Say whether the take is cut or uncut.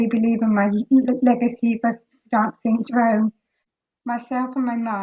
cut